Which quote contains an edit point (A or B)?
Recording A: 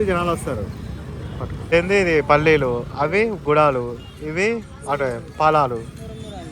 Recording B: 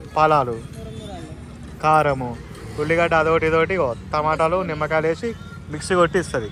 A